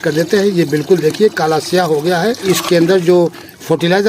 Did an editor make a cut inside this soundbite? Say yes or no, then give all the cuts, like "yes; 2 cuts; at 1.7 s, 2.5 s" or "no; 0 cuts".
yes; 1 cut; at 2.5 s